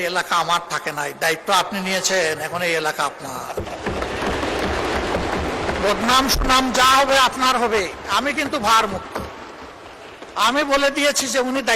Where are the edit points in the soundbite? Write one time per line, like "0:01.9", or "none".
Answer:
none